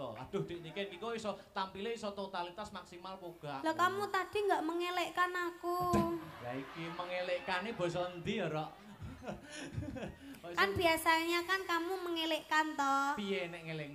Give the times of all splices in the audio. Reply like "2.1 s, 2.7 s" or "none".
none